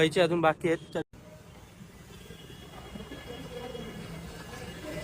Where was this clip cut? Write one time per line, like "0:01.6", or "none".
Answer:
0:01.0